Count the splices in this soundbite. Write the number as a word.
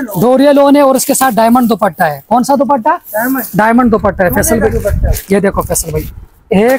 zero